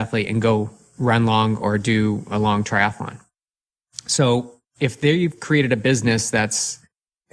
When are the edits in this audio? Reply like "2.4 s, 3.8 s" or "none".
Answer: none